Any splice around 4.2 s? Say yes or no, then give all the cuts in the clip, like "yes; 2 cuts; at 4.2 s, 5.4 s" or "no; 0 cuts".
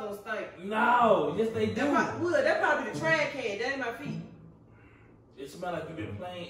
no; 0 cuts